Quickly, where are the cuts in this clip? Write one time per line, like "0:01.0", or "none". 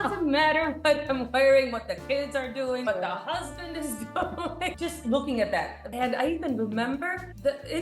0:02.9
0:04.7
0:05.8

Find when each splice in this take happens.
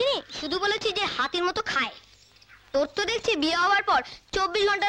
none

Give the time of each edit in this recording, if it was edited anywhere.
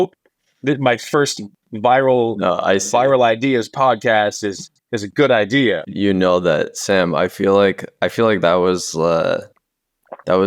none

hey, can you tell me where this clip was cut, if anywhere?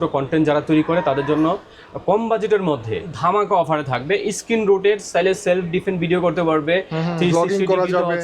0:03.1

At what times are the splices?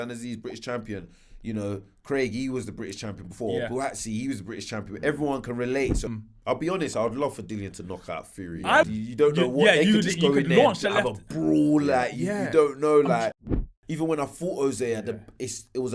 0:06.0
0:08.9
0:13.6

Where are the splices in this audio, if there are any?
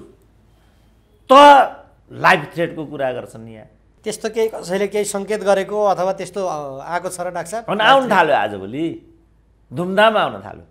0:03.9

